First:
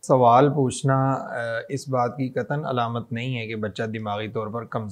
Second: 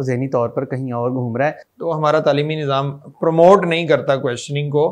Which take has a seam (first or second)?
second